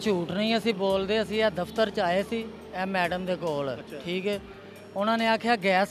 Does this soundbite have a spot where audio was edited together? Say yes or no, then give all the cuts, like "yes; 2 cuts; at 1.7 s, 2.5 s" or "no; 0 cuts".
no; 0 cuts